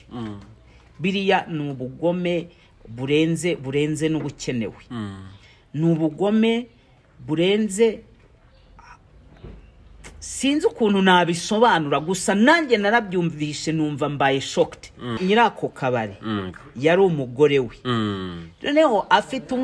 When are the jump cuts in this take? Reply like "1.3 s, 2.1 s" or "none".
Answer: 15.2 s